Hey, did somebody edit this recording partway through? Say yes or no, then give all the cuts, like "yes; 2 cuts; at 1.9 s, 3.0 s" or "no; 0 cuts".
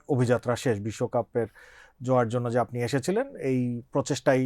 no; 0 cuts